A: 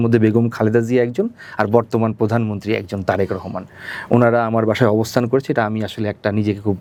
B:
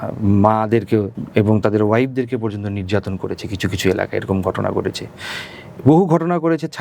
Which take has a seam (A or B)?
B